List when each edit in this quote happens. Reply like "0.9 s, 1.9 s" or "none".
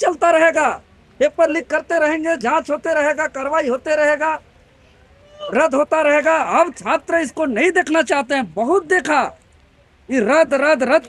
none